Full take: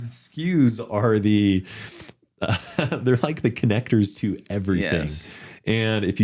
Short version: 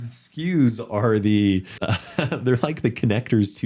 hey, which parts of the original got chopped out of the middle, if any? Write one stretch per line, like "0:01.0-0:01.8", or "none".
0:01.7-0:02.3